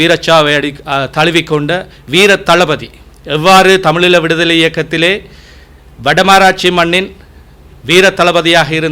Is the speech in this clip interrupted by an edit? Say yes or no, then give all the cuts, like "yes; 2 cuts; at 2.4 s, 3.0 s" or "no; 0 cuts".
no; 0 cuts